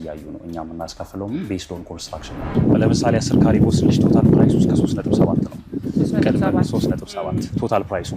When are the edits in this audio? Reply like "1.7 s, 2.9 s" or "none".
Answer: 2.5 s